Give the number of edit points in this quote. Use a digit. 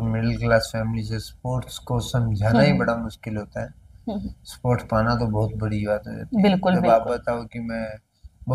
0